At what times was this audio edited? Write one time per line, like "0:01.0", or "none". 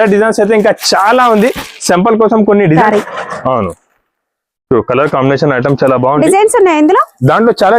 0:02.8

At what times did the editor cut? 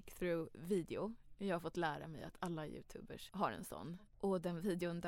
0:03.2
0:03.9

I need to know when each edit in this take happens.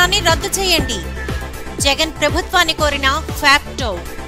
none

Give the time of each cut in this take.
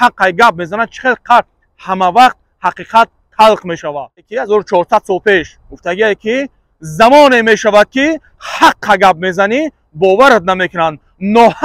0:04.3

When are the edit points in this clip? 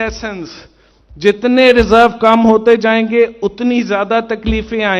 none

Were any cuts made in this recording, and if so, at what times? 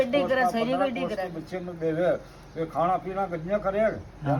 none

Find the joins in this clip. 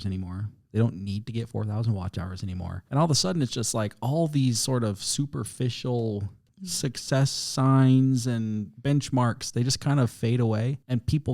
0:02.8

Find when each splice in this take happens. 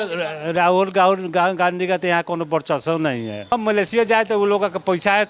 0:03.5

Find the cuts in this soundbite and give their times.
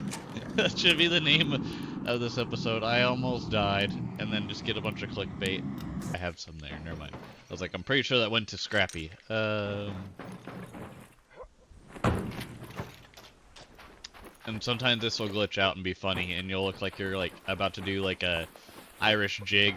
0:06.1

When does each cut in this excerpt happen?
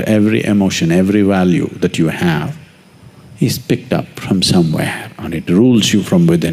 none

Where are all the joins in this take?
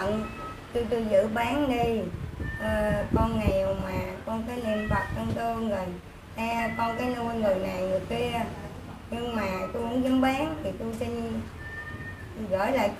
none

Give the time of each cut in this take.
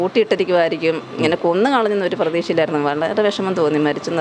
none

